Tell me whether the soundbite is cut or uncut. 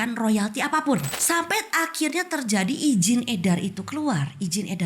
cut